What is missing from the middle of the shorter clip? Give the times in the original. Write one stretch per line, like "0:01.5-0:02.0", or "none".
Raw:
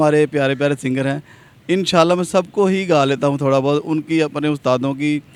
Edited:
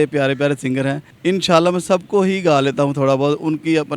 0:01.3-0:01.5